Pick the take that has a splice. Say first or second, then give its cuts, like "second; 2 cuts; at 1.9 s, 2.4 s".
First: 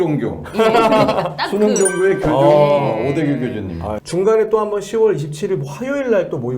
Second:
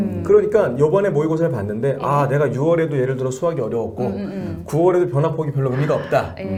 first; 1 cut; at 3.9 s